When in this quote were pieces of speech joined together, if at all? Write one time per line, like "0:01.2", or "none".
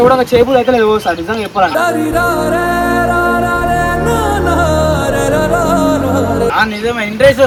none